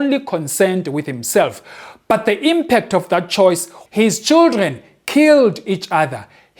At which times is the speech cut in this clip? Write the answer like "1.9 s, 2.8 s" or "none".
3.8 s